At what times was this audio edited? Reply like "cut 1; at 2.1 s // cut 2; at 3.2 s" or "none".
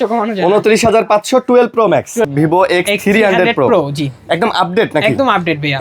cut 1; at 2.3 s